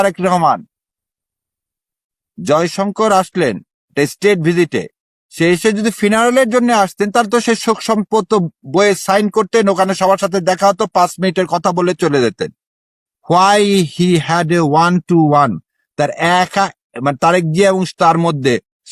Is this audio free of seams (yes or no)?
yes